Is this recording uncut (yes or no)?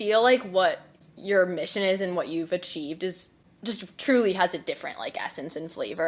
yes